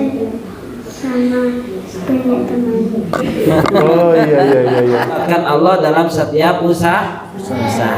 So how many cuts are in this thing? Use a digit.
1